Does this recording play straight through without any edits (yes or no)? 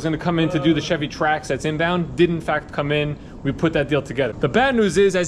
no